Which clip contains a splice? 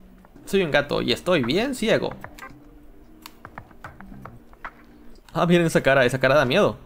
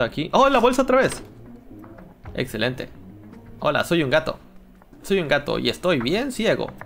first; 1 cut; at 5.1 s

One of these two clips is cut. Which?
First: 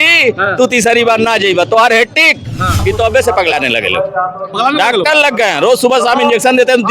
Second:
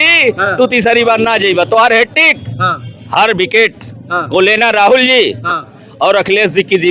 first; 1 cut; at 2.8 s

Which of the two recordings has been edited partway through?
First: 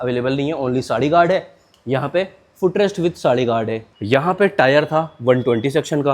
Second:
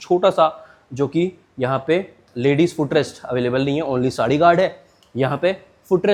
first; 1 cut; at 3.8 s

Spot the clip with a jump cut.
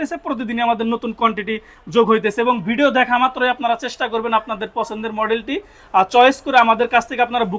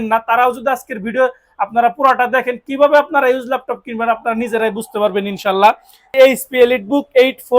second; 1 cut; at 6.1 s

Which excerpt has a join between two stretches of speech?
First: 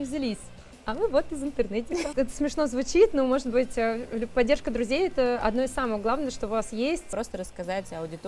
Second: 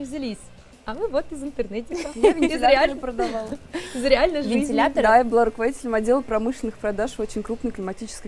first; 2 cuts; at 2.1 s, 7.1 s

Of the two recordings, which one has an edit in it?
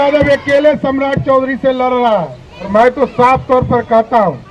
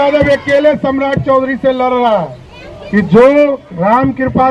second; 1 cut; at 2.6 s

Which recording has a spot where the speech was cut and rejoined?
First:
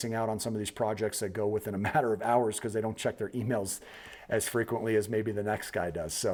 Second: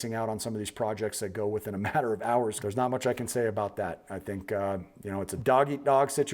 second; 2 cuts; at 2.6 s, 5.3 s

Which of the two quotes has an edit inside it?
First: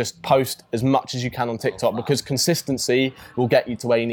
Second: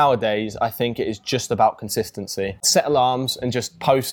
second; 1 cut; at 2.6 s

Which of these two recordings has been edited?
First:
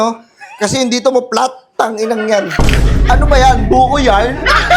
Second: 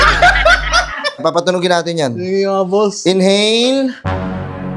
second; 1 cut; at 1.2 s

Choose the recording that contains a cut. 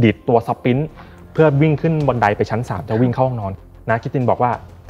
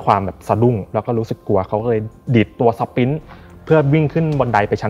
first; 1 cut; at 3.5 s

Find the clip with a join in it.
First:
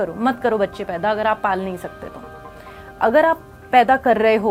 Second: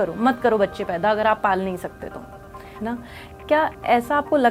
second; 1 cut; at 2.8 s

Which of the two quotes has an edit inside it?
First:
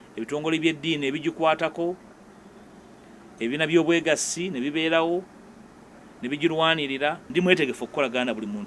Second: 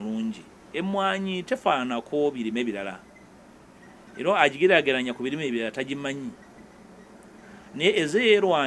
first; 1 cut; at 7.2 s

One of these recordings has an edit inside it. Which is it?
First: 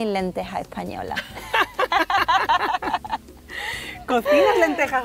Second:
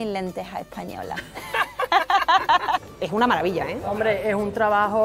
second; 1 cut; at 2.8 s

